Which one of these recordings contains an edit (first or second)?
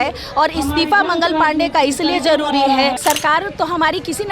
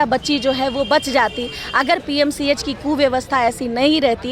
first